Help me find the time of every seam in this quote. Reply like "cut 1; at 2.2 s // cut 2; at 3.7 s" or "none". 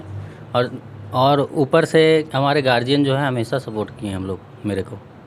none